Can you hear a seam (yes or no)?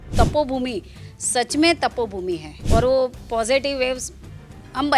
yes